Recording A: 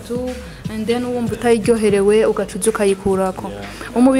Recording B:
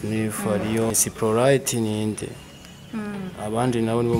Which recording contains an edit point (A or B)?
B